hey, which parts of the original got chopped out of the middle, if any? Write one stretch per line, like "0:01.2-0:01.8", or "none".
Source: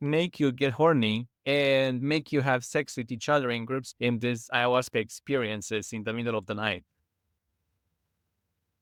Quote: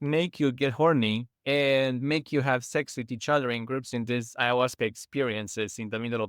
0:04.0-0:04.1